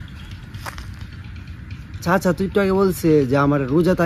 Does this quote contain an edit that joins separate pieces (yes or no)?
no